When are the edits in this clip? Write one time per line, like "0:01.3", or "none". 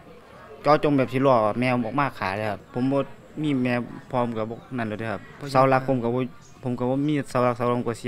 0:02.6
0:05.3